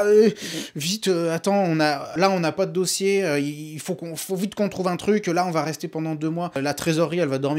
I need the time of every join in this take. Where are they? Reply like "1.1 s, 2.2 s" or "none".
2.1 s, 6.6 s